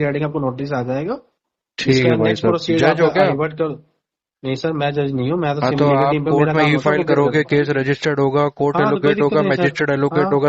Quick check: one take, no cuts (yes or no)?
yes